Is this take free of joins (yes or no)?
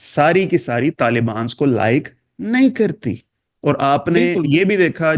yes